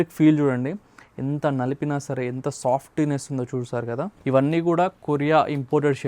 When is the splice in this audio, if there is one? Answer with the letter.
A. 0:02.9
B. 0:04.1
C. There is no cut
B